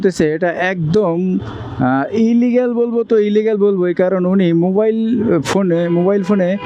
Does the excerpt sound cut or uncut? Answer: uncut